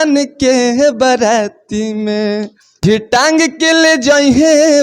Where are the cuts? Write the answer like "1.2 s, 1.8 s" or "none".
3.0 s